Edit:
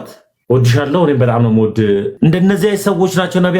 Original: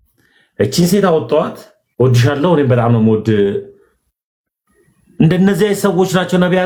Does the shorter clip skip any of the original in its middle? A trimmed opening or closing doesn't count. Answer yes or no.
yes